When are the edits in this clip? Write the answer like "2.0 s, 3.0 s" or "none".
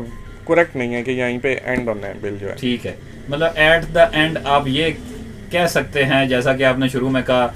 none